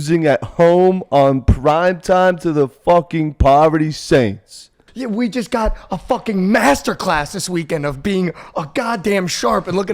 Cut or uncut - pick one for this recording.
cut